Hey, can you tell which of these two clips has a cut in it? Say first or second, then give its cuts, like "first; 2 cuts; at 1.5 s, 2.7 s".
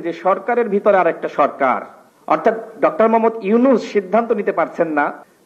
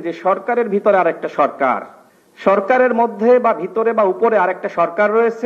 second; 1 cut; at 2.1 s